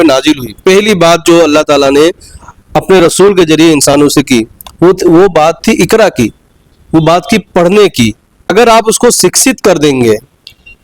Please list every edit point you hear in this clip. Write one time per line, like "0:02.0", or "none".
0:08.5

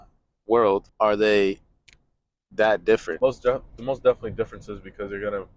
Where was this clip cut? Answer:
0:00.9
0:03.1

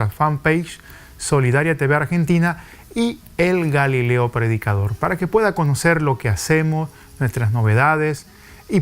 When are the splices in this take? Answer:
0:07.3

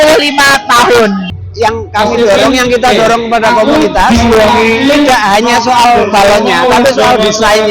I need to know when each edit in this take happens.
0:01.4

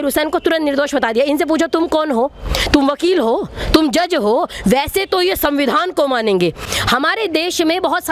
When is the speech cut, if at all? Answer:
0:06.6

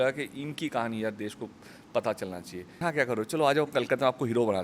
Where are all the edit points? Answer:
0:02.8

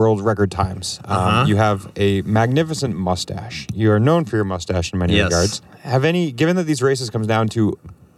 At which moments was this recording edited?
0:05.7

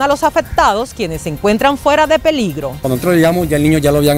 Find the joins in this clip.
0:02.8

